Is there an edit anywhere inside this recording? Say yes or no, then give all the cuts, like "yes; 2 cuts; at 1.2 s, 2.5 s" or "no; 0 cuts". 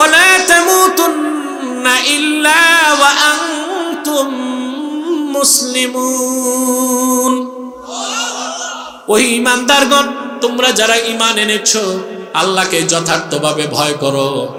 no; 0 cuts